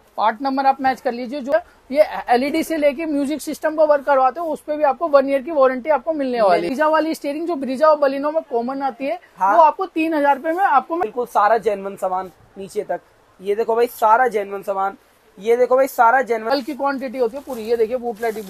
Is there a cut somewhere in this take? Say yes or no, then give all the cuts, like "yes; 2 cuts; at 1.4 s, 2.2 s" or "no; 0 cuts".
yes; 4 cuts; at 1.5 s, 6.7 s, 11.0 s, 16.5 s